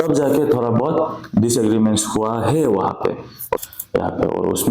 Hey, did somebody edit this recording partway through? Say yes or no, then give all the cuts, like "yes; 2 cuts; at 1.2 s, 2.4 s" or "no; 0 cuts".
yes; 1 cut; at 3.5 s